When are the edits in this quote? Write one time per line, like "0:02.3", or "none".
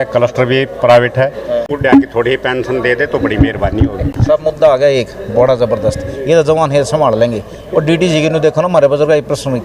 0:01.9
0:04.0